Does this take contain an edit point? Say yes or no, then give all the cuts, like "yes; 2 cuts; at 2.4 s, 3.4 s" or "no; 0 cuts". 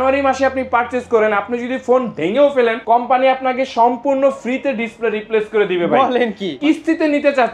yes; 2 cuts; at 2.8 s, 6.6 s